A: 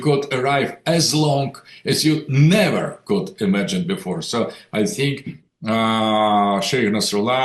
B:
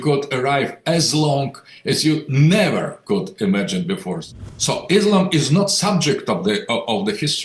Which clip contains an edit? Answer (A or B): B